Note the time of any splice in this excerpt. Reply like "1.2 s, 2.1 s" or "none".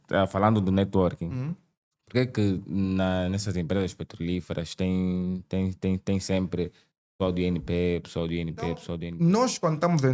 9.0 s